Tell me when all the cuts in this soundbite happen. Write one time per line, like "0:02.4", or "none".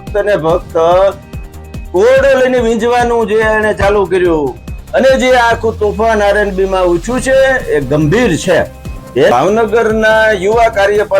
0:09.3